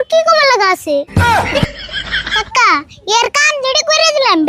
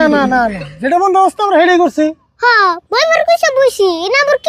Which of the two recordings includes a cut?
first; 2 cuts; at 1.1 s, 2.3 s

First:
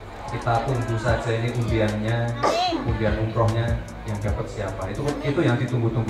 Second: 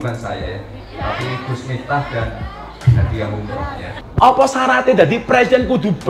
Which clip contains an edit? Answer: second; 1 cut; at 4.0 s

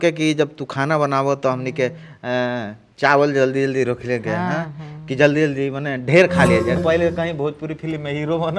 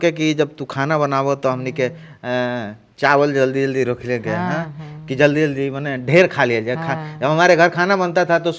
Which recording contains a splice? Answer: first; 1 cut; at 6.8 s

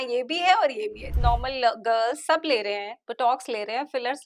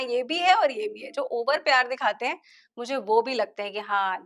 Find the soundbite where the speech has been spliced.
first; 1 cut; at 1.1 s

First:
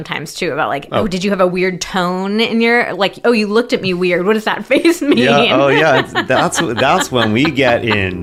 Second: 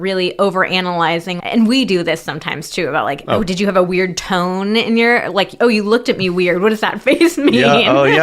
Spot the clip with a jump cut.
second; 1 cut; at 1.3 s

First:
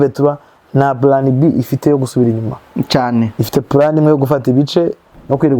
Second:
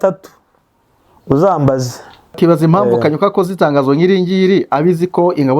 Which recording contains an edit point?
second; 1 cut; at 2.3 s

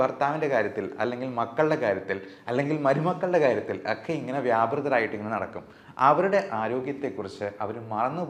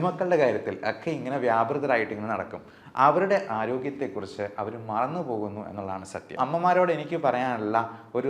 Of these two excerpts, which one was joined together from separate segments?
second; 1 cut; at 6.4 s

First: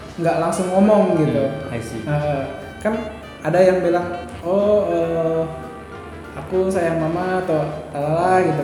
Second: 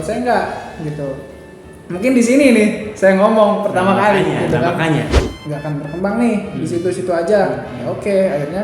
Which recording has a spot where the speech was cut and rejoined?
second; 1 cut; at 5.1 s

